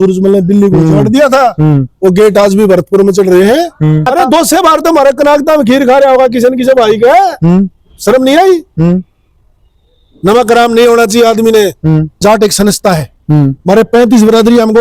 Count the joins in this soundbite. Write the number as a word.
two